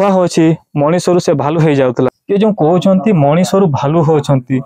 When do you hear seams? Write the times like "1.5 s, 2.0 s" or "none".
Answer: 2.2 s